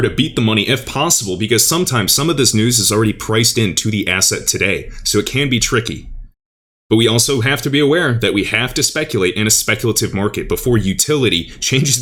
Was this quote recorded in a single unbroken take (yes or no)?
yes